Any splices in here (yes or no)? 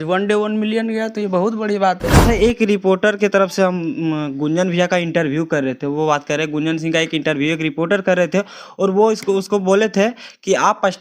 yes